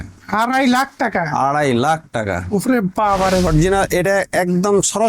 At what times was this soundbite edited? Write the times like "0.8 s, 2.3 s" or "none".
3.5 s